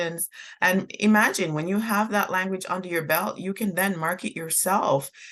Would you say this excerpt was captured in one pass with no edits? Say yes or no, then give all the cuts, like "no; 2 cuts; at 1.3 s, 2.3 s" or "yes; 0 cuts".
yes; 0 cuts